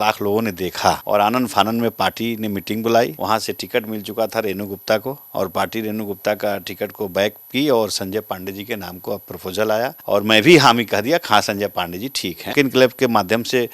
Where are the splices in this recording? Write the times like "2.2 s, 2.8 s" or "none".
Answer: 1.0 s, 3.2 s, 5.2 s, 10.0 s, 12.4 s